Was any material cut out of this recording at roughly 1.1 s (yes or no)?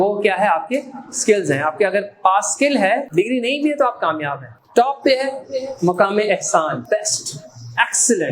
no